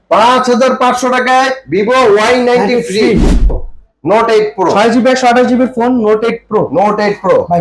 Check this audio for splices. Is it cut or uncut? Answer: cut